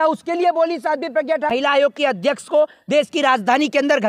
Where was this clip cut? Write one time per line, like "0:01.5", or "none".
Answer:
0:01.5

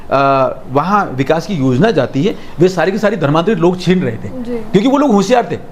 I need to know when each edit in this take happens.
none

